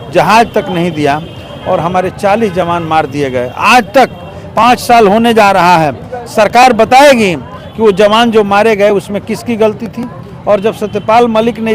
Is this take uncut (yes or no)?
yes